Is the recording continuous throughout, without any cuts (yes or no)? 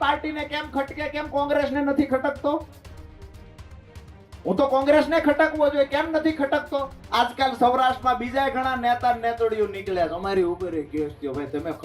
no